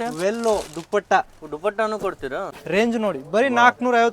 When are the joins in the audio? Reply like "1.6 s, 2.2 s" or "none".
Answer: 2.5 s